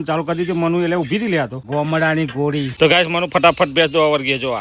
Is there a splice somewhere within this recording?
yes; 2 cuts; at 1.6 s, 2.7 s

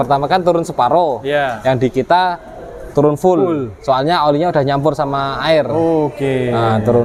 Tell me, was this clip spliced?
no; 0 cuts

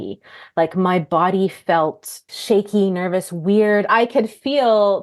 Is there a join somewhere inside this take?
yes; 2 cuts; at 2.3 s, 3.9 s

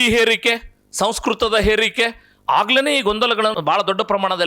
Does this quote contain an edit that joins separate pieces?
yes; 1 cut; at 3.6 s

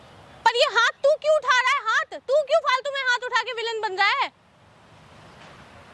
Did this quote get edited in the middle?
no; 0 cuts

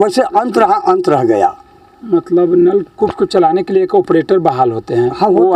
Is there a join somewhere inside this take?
no; 0 cuts

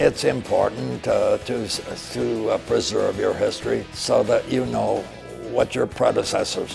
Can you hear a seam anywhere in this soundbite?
yes; 2 cuts; at 3.9 s, 5.1 s

